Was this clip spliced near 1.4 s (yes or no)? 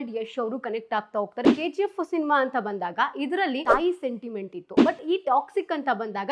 yes